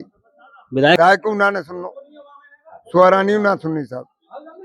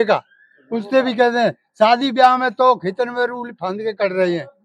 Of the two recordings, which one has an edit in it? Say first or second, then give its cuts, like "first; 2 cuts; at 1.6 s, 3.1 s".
first; 1 cut; at 1.0 s